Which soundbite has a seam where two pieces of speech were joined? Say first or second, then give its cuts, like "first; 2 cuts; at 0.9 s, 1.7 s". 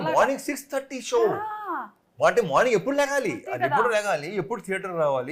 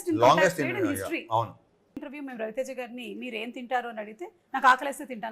second; 1 cut; at 2.0 s